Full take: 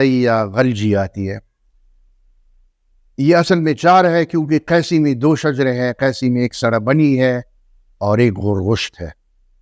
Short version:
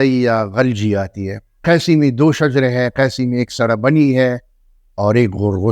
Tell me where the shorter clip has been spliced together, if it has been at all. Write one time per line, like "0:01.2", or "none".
0:01.6